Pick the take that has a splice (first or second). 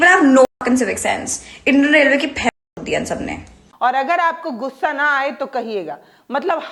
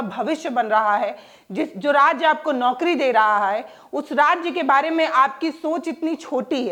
first